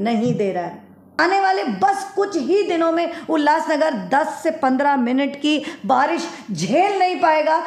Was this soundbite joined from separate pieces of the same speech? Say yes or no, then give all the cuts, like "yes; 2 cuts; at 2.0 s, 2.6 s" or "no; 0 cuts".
yes; 1 cut; at 1.1 s